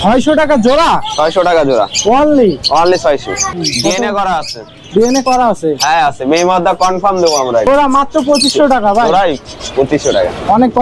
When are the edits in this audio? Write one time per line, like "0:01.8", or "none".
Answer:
0:03.4
0:07.7